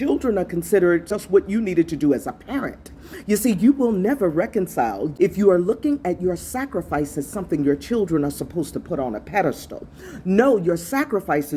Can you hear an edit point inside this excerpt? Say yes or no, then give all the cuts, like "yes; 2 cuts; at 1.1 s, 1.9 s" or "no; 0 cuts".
yes; 2 cuts; at 1.2 s, 5.1 s